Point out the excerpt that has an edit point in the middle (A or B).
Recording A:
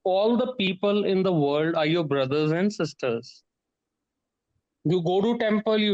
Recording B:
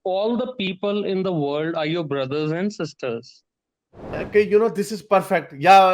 B